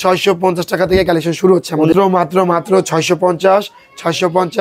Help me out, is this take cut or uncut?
cut